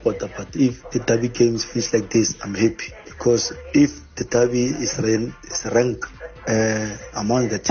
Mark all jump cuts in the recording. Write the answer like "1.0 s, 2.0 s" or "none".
none